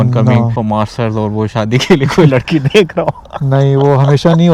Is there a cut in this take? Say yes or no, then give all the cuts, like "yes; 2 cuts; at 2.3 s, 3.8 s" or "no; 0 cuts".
no; 0 cuts